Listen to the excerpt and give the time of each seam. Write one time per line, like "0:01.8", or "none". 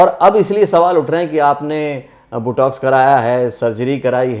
none